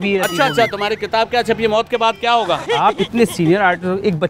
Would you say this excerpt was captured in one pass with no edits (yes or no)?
no